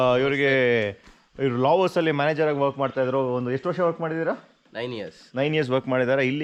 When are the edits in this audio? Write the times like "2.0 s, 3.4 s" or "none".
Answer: none